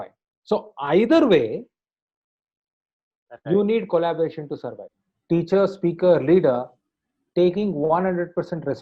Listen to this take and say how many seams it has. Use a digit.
1